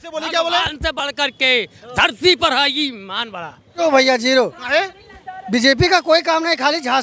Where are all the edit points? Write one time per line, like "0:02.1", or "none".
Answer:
0:03.8